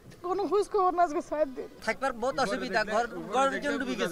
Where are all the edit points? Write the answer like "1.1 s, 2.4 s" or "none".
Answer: 1.7 s